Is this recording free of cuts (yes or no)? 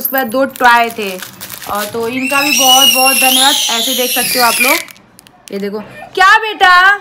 yes